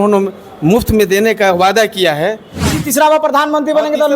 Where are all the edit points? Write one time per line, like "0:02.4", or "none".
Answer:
0:02.7